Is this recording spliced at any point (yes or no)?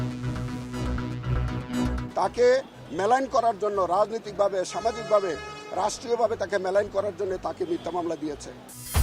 yes